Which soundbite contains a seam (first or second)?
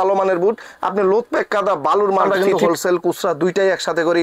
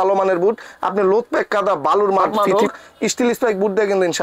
first